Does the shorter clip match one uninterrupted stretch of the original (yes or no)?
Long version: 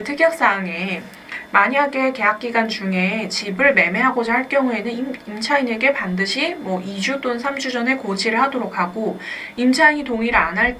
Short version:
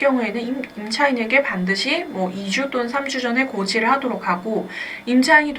yes